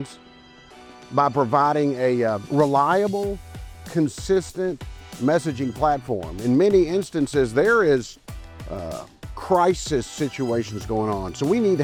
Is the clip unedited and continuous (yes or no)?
yes